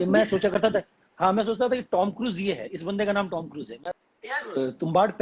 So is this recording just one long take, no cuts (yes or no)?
no